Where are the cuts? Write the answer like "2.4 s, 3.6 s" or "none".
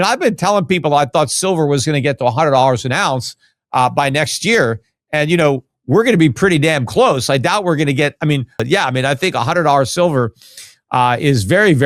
none